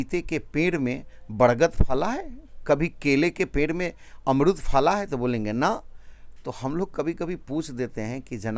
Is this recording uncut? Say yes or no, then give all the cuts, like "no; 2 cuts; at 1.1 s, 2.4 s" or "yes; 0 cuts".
yes; 0 cuts